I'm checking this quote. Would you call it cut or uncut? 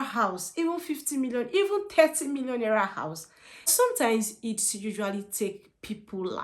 cut